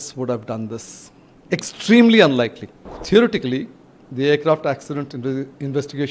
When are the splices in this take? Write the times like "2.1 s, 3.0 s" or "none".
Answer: 3.0 s